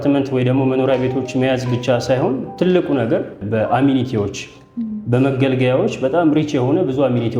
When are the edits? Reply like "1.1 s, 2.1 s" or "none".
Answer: 3.4 s

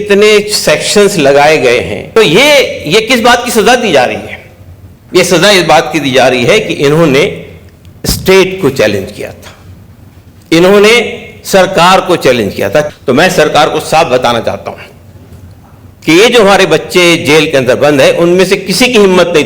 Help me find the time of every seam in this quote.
2.0 s, 12.9 s

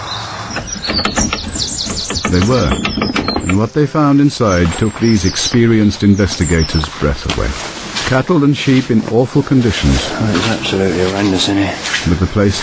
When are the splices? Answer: none

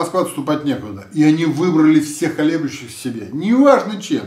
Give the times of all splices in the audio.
none

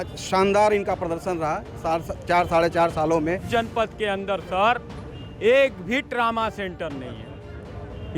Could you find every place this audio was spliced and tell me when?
3.5 s

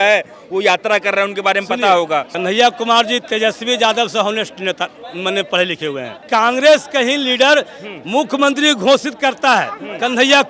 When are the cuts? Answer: 2.3 s, 6.2 s

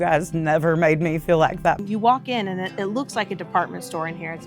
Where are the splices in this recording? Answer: 1.8 s

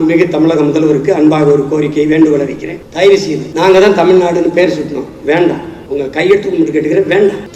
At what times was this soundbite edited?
3.4 s

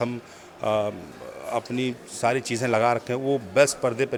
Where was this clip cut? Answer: none

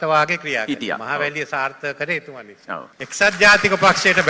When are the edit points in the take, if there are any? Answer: 3.0 s

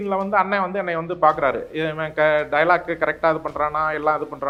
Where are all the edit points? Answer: none

